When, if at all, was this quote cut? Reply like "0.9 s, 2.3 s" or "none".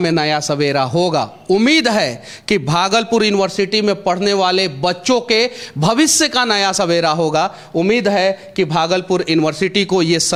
none